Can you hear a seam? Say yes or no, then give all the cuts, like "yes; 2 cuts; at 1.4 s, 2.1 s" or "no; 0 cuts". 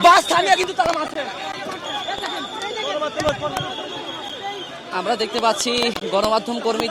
no; 0 cuts